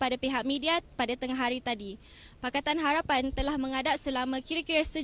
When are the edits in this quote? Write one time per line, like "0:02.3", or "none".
none